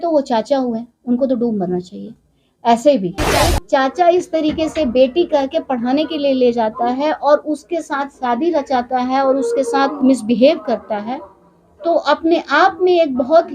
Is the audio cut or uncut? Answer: cut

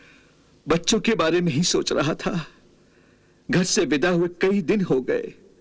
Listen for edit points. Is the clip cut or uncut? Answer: uncut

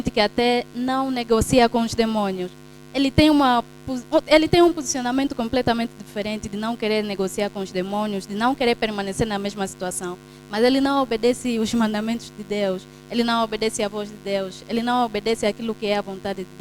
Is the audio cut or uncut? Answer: uncut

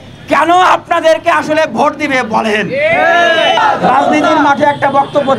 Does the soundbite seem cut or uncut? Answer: cut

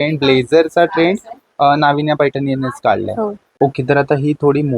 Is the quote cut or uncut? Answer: cut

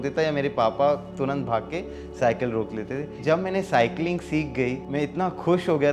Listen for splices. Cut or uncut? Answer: cut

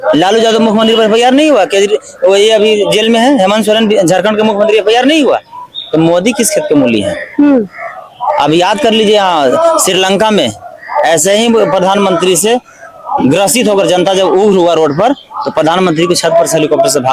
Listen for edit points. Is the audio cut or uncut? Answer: uncut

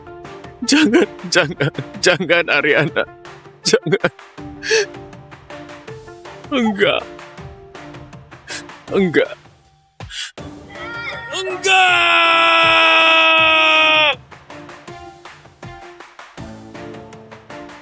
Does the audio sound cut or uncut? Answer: cut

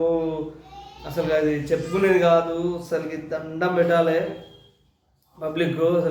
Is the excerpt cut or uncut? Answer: uncut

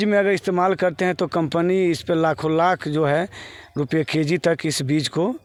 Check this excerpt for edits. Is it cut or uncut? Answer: uncut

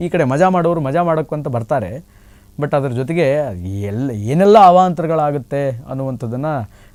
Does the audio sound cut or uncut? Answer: uncut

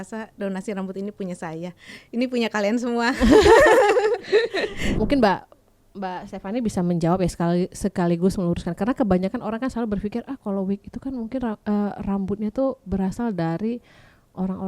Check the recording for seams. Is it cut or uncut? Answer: cut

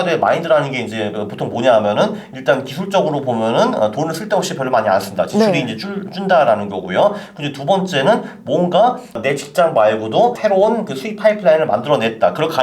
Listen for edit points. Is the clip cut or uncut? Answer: cut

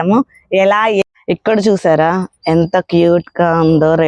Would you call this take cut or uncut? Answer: cut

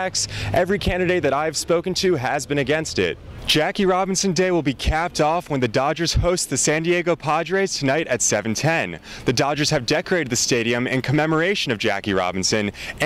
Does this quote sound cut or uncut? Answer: cut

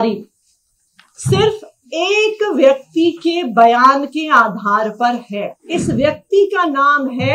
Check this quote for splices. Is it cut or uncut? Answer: cut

